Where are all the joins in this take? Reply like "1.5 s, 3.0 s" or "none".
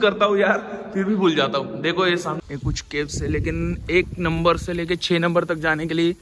2.4 s